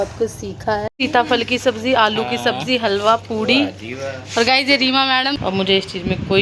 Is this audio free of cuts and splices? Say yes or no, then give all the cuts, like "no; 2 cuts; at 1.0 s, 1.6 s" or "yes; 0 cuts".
no; 2 cuts; at 0.9 s, 5.4 s